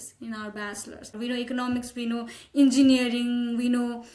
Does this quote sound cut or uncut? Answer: cut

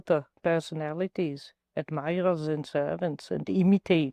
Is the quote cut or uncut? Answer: uncut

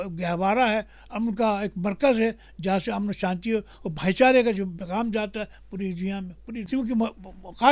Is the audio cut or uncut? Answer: cut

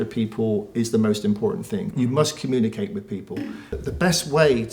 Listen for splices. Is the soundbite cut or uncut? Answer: cut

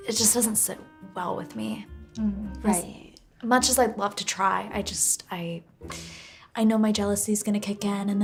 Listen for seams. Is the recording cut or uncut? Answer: uncut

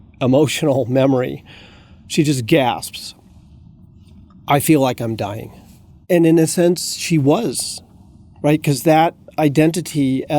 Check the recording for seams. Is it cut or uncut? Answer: cut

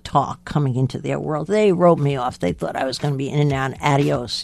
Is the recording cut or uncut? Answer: uncut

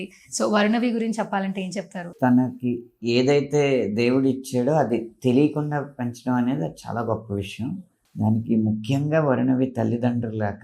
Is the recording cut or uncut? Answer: cut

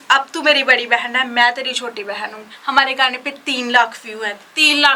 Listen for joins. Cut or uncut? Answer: cut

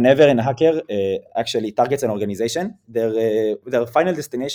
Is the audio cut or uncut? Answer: uncut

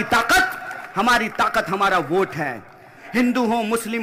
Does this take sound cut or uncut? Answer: uncut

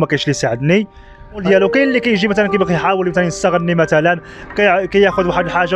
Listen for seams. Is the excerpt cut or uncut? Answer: cut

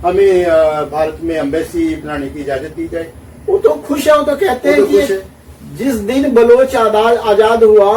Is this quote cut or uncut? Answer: uncut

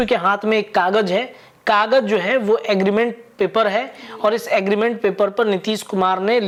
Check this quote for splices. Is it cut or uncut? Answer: uncut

